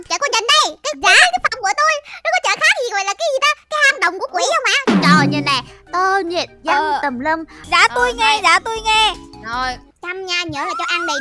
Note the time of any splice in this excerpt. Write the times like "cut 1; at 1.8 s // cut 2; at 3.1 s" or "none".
cut 1; at 7.5 s